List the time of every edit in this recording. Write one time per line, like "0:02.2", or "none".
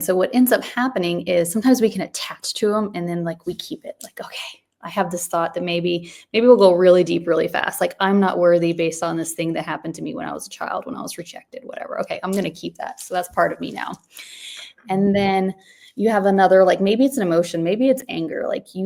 none

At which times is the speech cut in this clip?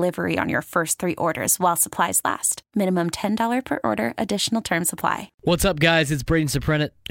0:05.3

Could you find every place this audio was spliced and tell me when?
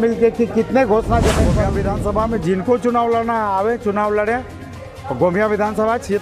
0:01.6

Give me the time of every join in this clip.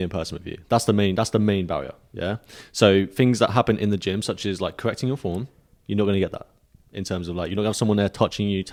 none

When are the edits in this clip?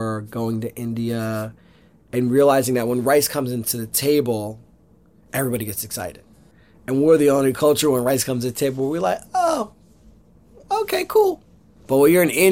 0:11.4

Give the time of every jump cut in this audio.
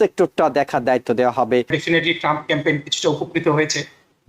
0:01.8

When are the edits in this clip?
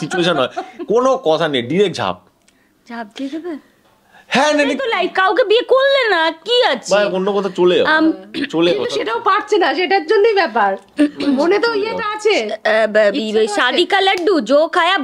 none

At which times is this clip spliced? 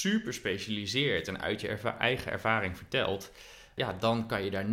none

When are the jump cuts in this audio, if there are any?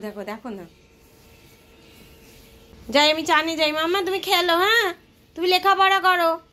0:02.7

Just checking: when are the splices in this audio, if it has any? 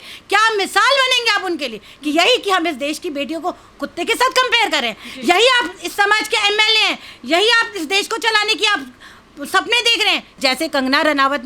0:10.4

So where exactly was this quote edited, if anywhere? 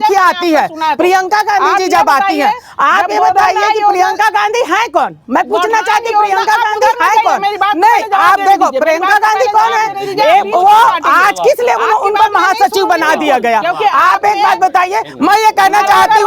none

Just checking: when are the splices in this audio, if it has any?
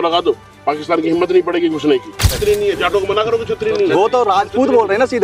0:02.3

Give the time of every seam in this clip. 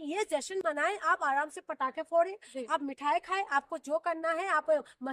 none

